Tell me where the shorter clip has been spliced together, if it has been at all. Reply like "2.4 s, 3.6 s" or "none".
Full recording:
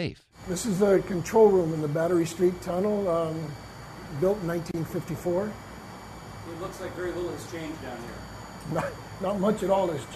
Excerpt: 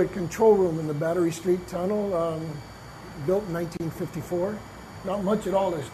4.9 s